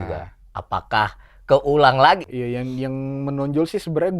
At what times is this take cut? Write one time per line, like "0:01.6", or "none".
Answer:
0:02.2